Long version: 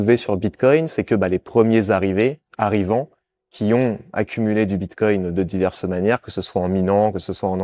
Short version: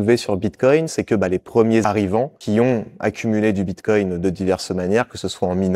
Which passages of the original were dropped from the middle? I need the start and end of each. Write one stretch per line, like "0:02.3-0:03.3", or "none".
0:01.9-0:03.0